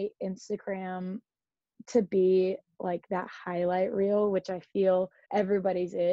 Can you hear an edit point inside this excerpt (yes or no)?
yes